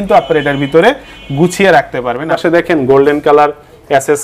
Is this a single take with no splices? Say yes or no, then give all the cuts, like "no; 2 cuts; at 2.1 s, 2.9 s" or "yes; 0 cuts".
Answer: no; 1 cut; at 2.3 s